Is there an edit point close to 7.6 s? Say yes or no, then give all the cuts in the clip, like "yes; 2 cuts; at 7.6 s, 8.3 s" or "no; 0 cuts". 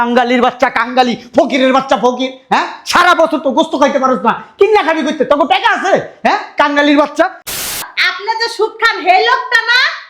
yes; 1 cut; at 7.6 s